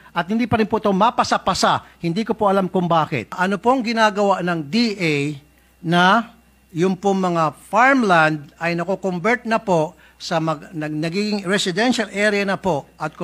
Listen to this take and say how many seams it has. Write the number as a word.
one